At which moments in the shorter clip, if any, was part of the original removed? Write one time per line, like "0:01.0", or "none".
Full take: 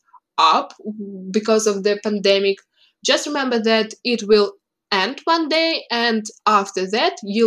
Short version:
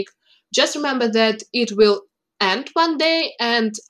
none